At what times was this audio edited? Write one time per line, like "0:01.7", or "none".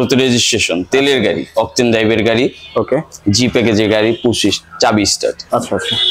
none